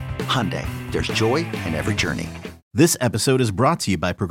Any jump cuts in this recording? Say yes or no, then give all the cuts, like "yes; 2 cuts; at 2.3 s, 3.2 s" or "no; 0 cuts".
yes; 1 cut; at 2.6 s